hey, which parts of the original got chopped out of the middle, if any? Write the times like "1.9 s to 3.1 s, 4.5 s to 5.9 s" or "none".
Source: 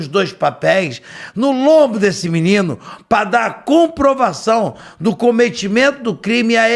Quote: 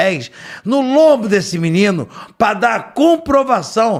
none